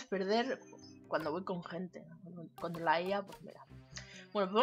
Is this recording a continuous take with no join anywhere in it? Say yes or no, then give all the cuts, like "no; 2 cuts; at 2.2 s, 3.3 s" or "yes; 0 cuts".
no; 1 cut; at 1.0 s